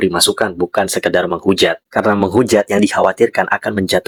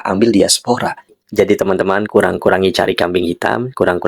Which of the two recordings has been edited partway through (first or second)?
second